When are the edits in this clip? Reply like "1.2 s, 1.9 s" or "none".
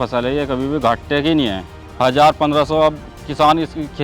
1.9 s